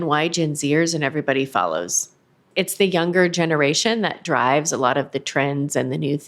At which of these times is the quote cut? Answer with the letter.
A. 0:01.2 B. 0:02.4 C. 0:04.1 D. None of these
B